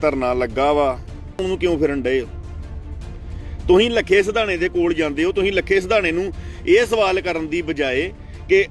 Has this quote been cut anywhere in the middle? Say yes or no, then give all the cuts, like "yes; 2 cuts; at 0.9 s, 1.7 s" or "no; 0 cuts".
yes; 1 cut; at 1.4 s